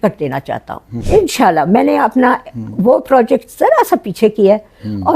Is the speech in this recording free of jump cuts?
no; 1 cut; at 0.9 s

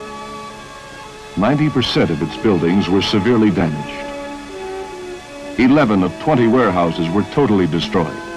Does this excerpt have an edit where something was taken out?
no; 0 cuts

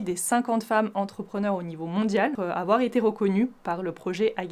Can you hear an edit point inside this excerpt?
no; 0 cuts

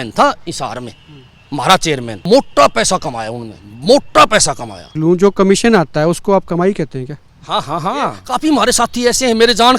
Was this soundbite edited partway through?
yes; 3 cuts; at 2.2 s, 4.9 s, 8.2 s

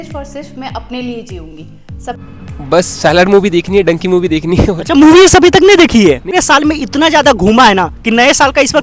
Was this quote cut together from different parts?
yes; 2 cuts; at 2.2 s, 6.4 s

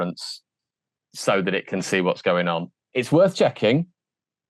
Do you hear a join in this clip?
yes; 1 cut; at 2.8 s

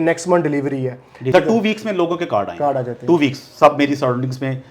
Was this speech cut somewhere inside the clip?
yes; 1 cut; at 1.3 s

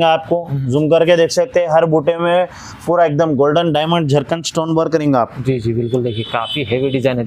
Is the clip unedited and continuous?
yes; 0 cuts

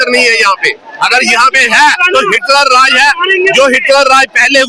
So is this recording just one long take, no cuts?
yes; 0 cuts

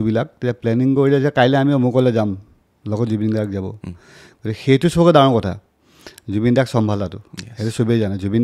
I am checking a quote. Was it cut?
no; 0 cuts

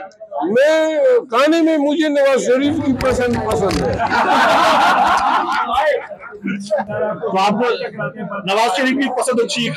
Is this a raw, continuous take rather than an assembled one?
no; 1 cut; at 6.9 s

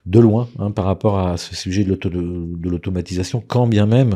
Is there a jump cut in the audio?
no; 0 cuts

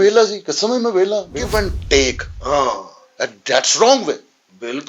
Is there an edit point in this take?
yes; 1 cut; at 1.5 s

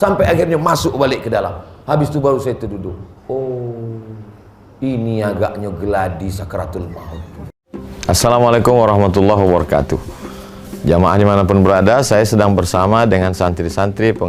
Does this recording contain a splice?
yes; 1 cut; at 7.4 s

